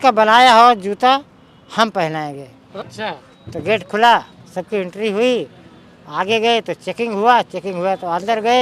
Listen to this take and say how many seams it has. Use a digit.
1